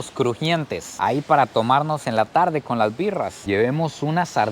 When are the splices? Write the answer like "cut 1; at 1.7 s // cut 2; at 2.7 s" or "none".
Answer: cut 1; at 3.4 s